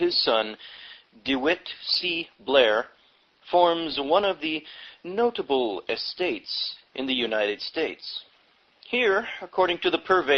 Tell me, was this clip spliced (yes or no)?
no